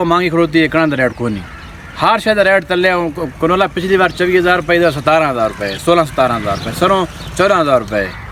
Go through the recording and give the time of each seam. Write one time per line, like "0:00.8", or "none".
none